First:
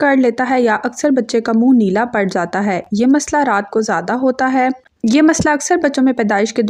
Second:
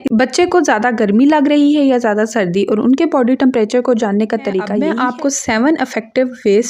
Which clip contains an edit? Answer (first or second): second